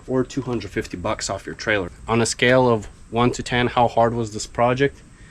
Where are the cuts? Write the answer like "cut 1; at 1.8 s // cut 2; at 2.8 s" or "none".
cut 1; at 2.0 s